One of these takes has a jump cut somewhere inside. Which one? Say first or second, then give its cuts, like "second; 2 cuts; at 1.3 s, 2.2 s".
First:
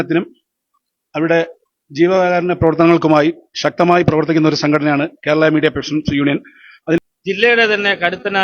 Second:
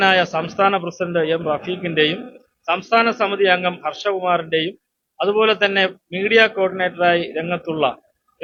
first; 1 cut; at 7.0 s